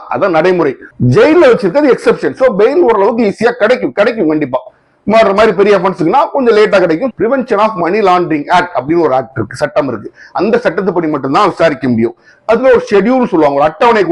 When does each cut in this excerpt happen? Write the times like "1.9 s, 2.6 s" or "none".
7.1 s